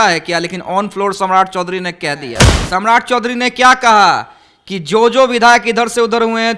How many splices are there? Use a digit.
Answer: 1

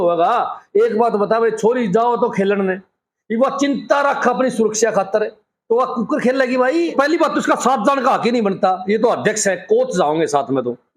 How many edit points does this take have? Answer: 1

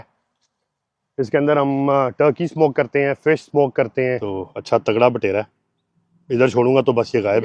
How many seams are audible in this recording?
1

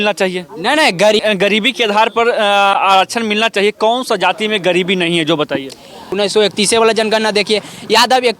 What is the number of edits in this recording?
2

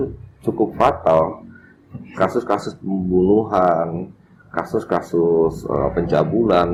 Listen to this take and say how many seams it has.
0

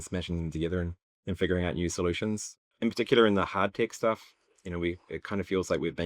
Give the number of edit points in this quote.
2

